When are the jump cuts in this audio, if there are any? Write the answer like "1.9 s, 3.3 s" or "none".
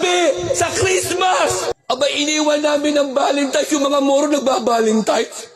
1.8 s